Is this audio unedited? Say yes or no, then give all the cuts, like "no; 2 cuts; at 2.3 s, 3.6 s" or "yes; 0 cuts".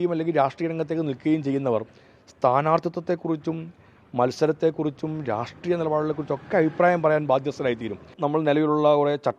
no; 1 cut; at 8.1 s